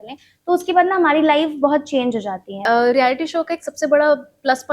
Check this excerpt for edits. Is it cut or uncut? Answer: cut